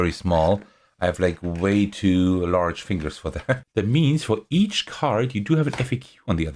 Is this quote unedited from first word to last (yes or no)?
no